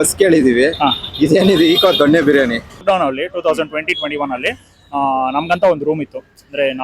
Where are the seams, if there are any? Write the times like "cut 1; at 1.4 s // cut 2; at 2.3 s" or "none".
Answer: cut 1; at 2.8 s